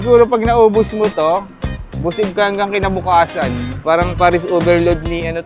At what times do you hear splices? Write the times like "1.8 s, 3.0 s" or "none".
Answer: 3.8 s